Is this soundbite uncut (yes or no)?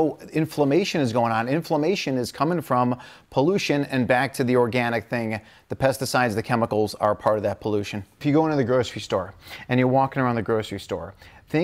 no